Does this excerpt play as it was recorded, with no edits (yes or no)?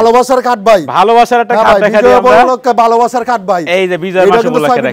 yes